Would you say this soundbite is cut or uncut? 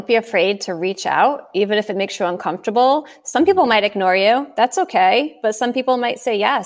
uncut